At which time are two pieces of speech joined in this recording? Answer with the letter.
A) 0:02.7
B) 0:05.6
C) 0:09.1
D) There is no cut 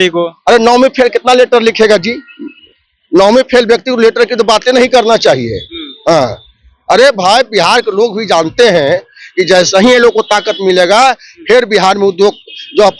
D